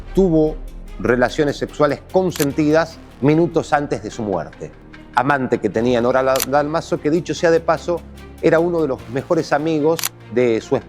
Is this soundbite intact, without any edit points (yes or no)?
no